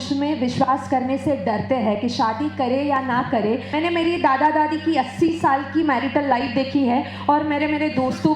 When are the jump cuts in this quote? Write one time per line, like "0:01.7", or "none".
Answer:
none